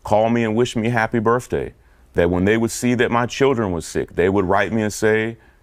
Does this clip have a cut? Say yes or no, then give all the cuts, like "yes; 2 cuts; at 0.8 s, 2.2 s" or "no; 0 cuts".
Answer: no; 0 cuts